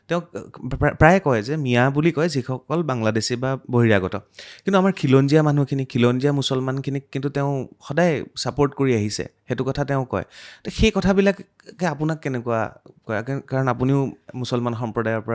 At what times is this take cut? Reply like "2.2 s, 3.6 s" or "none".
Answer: none